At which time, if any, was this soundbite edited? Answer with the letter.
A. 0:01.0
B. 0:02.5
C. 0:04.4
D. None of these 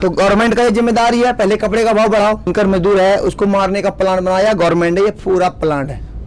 B